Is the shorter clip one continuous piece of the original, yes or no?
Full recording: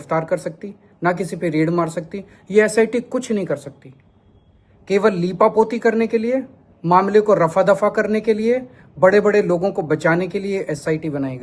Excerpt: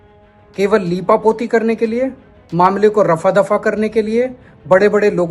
yes